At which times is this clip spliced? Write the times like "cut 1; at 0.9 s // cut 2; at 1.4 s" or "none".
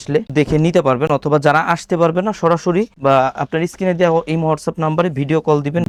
none